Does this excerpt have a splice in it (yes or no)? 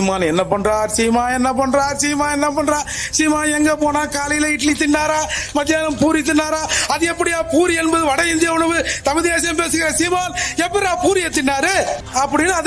no